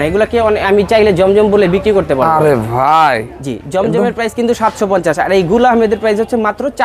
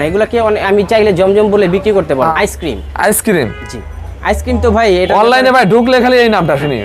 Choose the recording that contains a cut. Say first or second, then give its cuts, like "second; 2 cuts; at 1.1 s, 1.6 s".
second; 1 cut; at 2.3 s